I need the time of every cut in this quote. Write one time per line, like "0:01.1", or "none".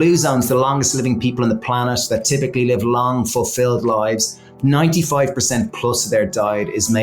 none